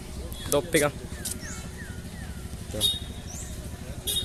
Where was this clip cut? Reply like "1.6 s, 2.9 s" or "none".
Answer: none